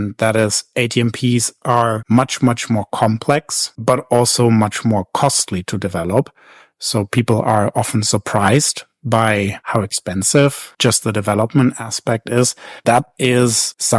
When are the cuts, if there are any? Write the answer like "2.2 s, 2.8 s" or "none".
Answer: none